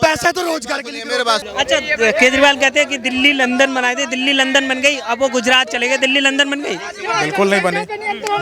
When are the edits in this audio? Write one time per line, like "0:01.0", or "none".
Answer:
0:01.5